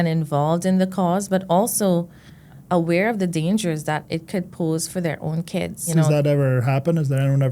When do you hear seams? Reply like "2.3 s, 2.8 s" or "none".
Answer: 2.6 s